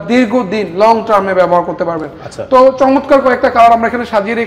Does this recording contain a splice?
no; 0 cuts

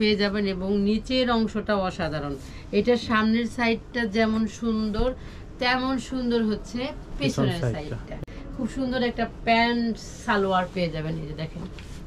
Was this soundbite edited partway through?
yes; 1 cut; at 8.2 s

